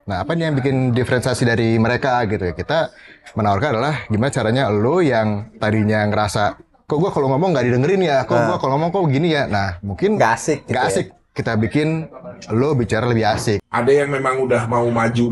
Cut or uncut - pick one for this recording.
cut